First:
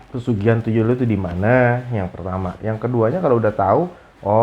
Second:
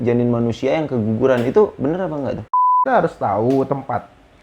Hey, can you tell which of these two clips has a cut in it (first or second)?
second